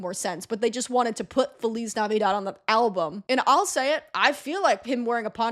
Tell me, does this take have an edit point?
yes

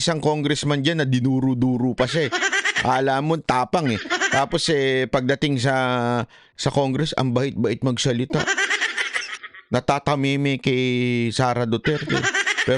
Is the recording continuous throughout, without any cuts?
yes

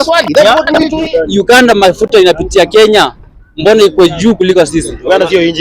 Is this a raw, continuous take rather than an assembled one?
no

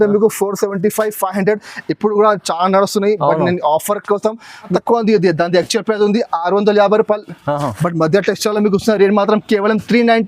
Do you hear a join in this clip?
yes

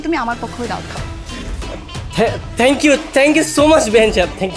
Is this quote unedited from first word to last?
yes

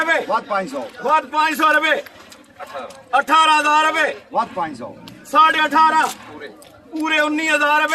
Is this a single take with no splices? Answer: yes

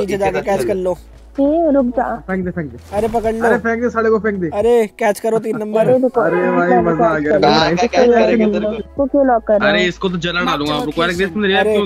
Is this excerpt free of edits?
no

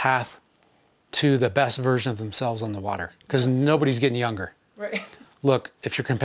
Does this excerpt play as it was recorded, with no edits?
no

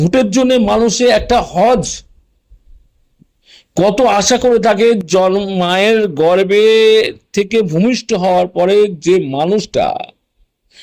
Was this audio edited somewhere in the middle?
no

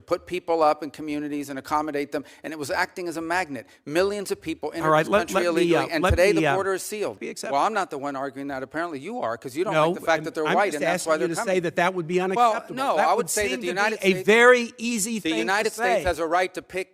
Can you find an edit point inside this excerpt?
yes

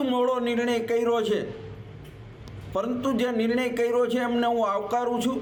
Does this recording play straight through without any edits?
yes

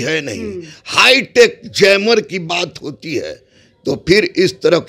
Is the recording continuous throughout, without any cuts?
yes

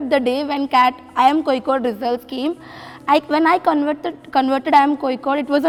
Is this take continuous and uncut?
yes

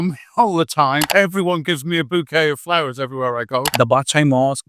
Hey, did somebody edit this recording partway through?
yes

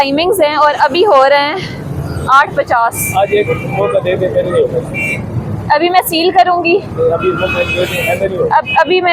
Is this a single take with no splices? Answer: yes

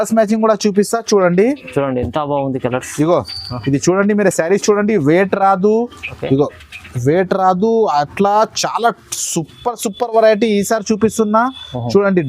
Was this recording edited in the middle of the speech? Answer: no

